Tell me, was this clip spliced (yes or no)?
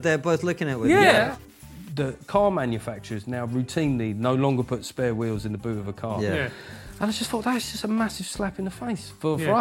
yes